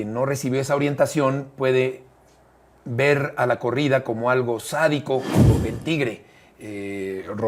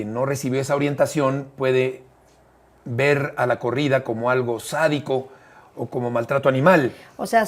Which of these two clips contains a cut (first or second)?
first